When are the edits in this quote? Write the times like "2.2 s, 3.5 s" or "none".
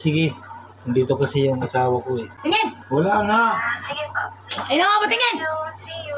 2.3 s